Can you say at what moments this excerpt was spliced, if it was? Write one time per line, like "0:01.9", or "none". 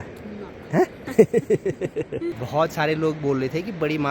0:02.4

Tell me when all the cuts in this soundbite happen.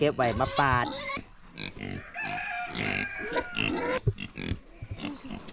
0:01.3
0:04.0

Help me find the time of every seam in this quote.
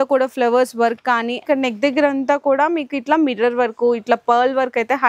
0:01.4

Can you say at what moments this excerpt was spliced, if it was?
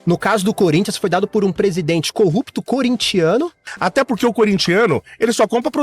0:03.6

